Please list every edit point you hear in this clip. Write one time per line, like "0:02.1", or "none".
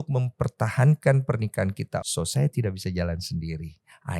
0:02.1